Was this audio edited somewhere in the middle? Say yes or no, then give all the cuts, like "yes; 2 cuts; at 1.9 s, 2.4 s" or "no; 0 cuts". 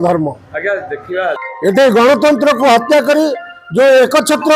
yes; 1 cut; at 1.5 s